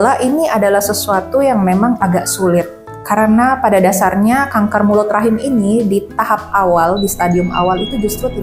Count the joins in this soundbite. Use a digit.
0